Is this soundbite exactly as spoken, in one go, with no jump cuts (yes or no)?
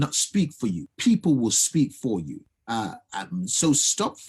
no